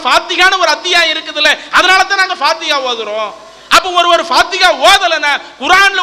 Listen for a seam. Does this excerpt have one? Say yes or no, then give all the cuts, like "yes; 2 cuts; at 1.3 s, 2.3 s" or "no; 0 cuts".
no; 0 cuts